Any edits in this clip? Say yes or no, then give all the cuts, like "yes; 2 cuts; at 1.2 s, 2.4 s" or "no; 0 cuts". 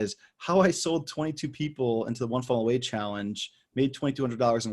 no; 0 cuts